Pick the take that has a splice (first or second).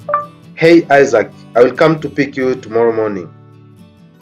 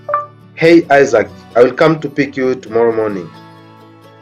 first